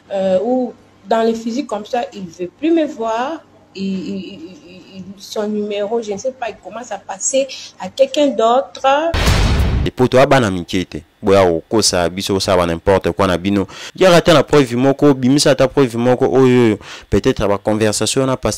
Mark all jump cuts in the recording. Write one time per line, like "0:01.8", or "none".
0:09.6
0:13.8